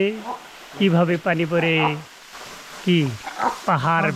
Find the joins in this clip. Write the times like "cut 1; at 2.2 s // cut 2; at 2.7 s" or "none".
none